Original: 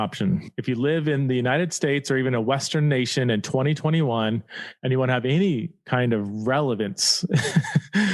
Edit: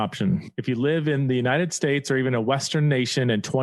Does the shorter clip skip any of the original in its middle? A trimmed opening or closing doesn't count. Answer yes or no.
no